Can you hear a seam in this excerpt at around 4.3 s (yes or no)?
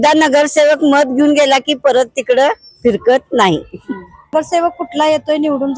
yes